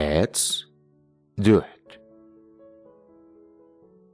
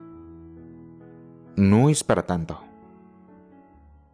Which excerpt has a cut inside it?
second; 2 cuts; at 1.4 s, 2.6 s

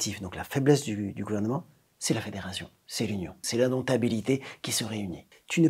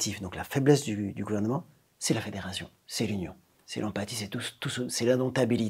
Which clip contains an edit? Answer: first; 1 cut; at 3.4 s

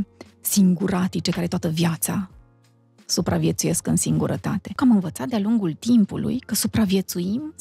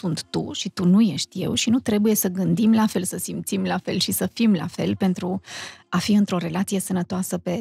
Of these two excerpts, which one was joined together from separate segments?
first; 1 cut; at 4.7 s

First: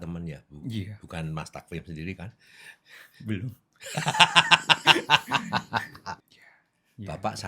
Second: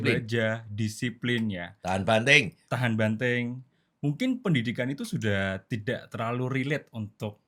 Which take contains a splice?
first; 1 cut; at 6.2 s

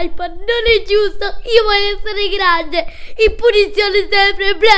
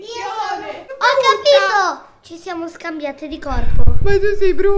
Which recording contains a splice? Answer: second; 1 cut; at 0.9 s

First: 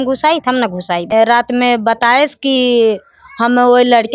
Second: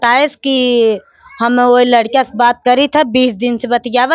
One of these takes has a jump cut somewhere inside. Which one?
first; 1 cut; at 1.1 s

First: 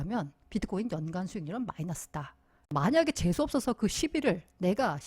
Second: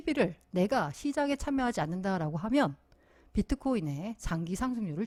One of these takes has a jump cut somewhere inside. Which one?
first; 1 cut; at 2.7 s

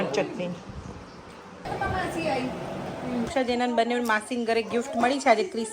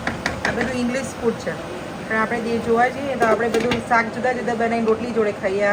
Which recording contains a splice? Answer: first; 2 cuts; at 1.6 s, 3.3 s

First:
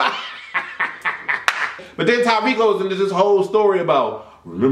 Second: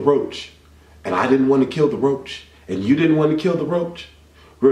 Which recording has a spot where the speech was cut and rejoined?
first; 1 cut; at 1.8 s

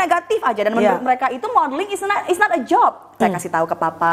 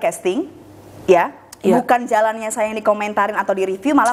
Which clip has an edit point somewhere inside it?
first; 1 cut; at 3.2 s

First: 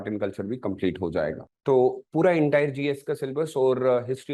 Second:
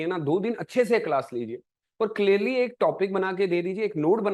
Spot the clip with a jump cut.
first; 1 cut; at 1.5 s

